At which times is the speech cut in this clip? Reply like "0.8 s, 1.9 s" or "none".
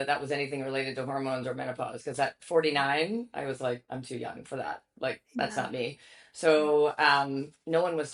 none